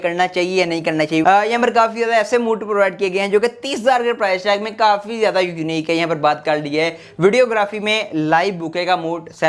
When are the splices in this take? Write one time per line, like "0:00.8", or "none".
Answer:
0:01.2